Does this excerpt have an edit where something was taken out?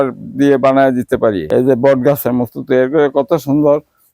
yes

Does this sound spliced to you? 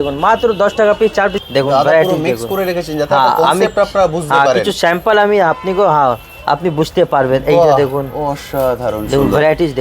yes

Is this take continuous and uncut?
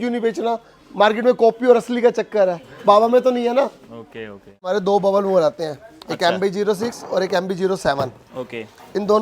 no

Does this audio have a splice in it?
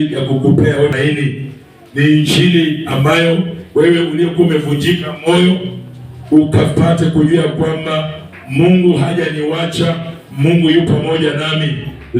yes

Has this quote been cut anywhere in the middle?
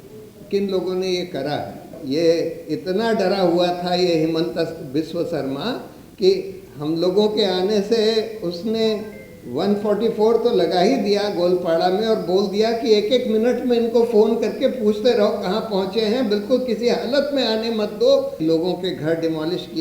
yes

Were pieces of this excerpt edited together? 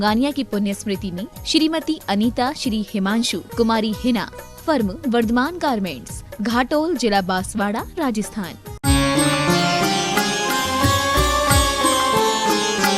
yes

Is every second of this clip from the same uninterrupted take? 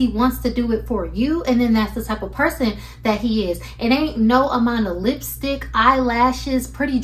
yes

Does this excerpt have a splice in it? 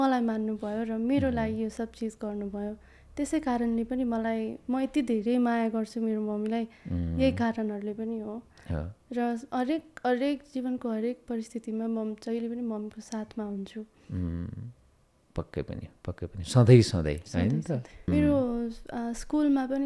yes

